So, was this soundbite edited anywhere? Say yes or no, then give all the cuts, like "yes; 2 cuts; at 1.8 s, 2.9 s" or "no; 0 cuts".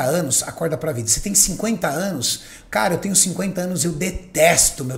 no; 0 cuts